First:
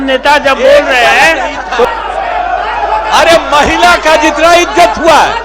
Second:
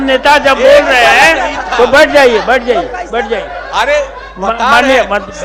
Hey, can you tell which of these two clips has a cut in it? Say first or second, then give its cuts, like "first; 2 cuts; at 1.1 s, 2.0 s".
first; 1 cut; at 1.9 s